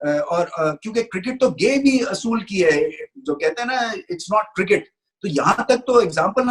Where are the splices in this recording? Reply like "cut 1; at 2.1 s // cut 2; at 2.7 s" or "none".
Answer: none

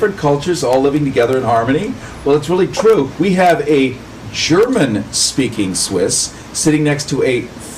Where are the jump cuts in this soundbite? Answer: cut 1; at 5.1 s

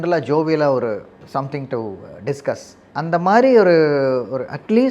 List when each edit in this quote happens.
cut 1; at 1.1 s // cut 2; at 2.8 s

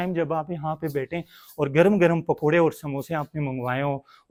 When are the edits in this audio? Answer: none

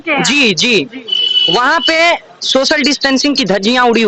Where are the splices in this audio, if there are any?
none

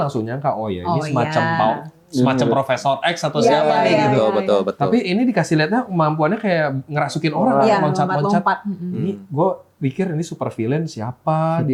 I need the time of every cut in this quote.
none

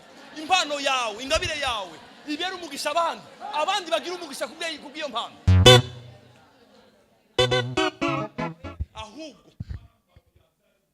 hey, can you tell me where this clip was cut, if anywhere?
cut 1; at 8.6 s

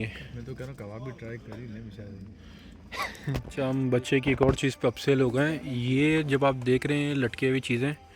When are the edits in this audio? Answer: cut 1; at 3.5 s

